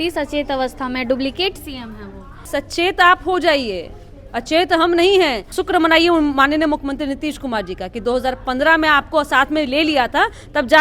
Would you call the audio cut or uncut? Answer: cut